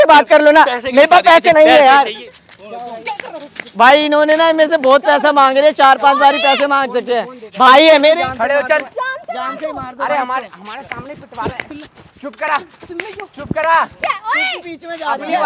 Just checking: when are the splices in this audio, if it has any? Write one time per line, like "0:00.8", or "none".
0:02.2
0:08.2